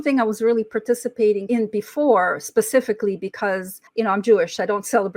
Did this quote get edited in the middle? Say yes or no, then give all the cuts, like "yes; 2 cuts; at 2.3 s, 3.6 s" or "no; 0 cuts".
yes; 2 cuts; at 1.4 s, 3.8 s